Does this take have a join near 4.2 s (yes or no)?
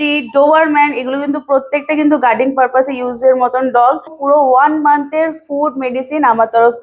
yes